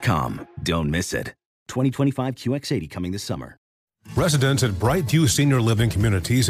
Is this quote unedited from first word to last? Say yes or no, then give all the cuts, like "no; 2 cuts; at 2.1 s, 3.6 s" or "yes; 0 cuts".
no; 1 cut; at 3.7 s